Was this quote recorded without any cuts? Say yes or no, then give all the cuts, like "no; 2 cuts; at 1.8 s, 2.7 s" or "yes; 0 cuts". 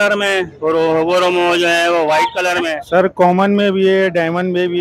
no; 1 cut; at 2.8 s